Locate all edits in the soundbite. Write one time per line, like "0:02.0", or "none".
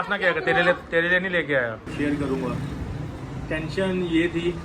0:01.8